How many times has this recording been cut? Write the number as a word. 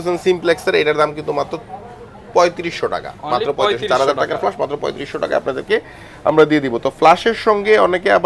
zero